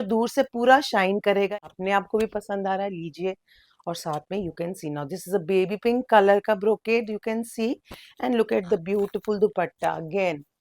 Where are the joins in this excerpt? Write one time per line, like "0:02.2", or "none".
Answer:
0:01.5